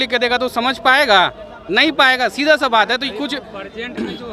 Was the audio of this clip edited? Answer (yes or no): no